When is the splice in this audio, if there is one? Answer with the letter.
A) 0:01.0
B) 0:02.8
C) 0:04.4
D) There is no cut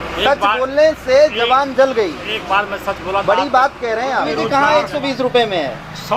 C